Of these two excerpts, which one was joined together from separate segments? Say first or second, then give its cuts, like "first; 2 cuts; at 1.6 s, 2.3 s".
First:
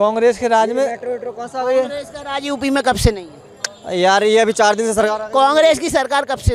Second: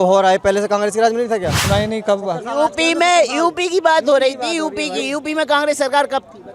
second; 1 cut; at 1.6 s